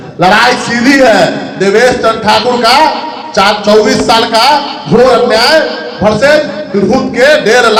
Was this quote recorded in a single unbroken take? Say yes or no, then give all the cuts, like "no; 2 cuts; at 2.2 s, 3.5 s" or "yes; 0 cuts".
yes; 0 cuts